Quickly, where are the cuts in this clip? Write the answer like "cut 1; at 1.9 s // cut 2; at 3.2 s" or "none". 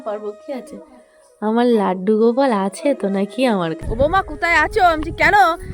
cut 1; at 3.8 s